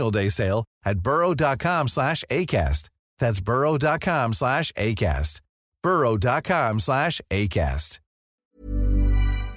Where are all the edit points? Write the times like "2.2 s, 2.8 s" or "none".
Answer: 8.5 s